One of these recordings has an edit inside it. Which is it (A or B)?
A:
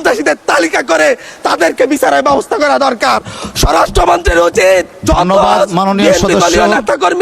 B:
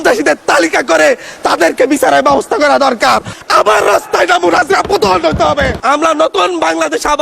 B